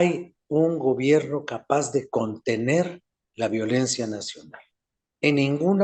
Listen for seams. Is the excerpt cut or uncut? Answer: uncut